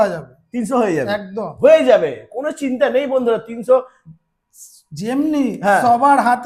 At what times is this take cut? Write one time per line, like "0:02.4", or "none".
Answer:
none